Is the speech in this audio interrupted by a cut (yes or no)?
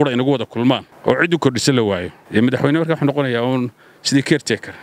yes